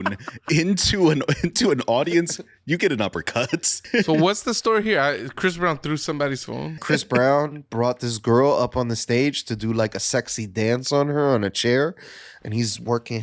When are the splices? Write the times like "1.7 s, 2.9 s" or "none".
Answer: 3.8 s, 6.8 s